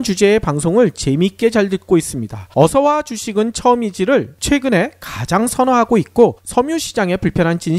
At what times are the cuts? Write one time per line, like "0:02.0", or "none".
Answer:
none